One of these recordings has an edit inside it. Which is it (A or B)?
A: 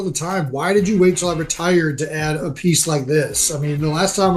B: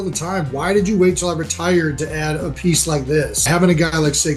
B